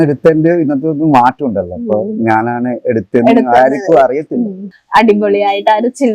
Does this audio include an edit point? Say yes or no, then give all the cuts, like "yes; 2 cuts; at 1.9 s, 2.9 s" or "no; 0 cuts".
yes; 1 cut; at 4.7 s